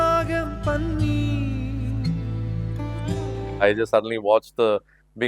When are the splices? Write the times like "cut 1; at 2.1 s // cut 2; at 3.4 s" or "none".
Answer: cut 1; at 3.6 s

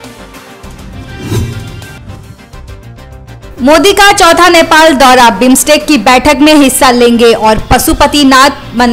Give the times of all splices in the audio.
cut 1; at 1.1 s

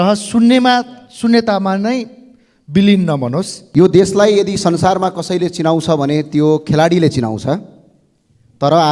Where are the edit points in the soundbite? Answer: cut 1; at 3.6 s

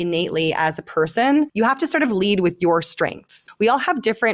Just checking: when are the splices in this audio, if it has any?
cut 1; at 1.5 s // cut 2; at 3.4 s

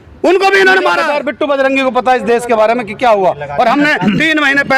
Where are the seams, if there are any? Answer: cut 1; at 1.0 s

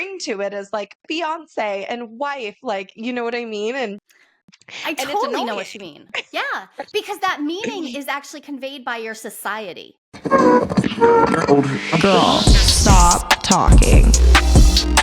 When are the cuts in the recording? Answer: cut 1; at 10.0 s

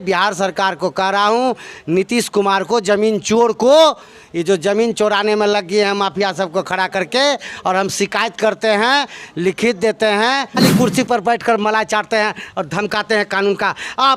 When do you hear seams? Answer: cut 1; at 10.6 s

